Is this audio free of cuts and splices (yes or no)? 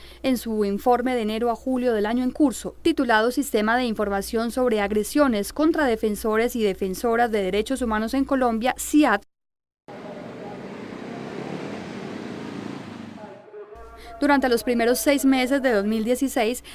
no